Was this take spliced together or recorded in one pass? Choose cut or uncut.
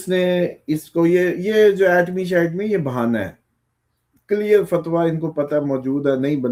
uncut